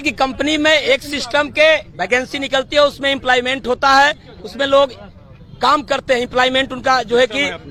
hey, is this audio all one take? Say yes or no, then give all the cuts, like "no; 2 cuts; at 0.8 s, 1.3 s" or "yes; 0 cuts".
yes; 0 cuts